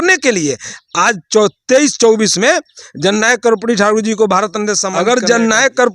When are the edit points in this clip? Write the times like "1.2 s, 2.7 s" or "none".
4.9 s